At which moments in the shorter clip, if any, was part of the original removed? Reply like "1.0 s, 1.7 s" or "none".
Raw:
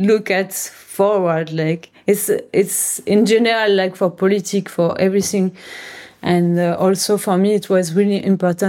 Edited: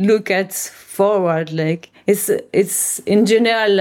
none